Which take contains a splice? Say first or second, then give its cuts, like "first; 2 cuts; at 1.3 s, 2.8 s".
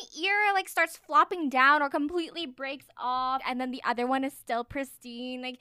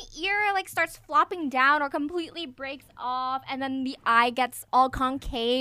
first; 1 cut; at 3.4 s